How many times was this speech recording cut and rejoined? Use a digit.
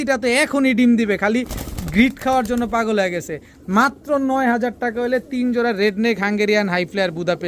0